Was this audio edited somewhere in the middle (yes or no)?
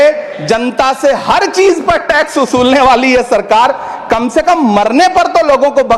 no